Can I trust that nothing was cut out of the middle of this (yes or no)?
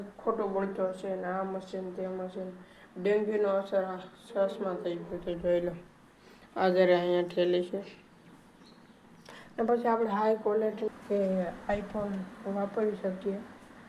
no